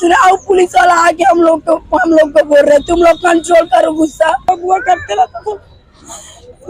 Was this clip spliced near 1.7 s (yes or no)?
no